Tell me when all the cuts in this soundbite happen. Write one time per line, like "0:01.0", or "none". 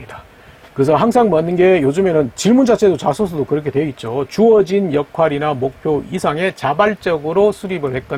none